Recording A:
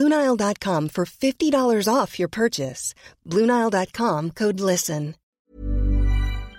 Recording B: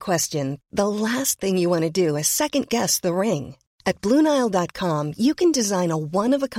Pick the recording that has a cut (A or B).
A